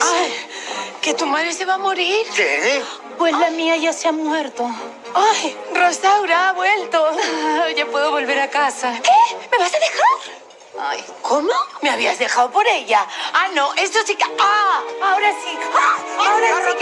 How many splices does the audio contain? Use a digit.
1